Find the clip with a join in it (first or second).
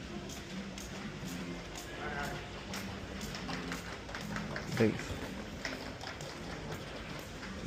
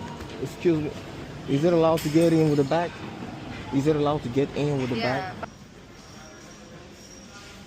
second